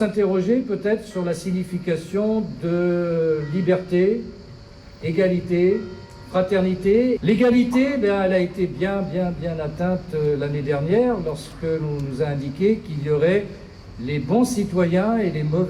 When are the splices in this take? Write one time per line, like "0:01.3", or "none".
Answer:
0:07.2